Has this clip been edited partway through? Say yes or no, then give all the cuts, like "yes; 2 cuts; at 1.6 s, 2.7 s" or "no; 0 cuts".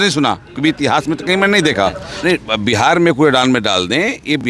yes; 1 cut; at 2.1 s